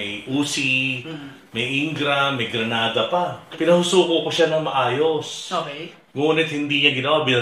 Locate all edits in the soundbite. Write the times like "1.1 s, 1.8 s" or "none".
3.4 s